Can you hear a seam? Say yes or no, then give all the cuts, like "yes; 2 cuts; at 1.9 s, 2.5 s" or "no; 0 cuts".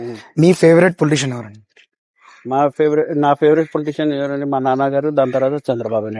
no; 0 cuts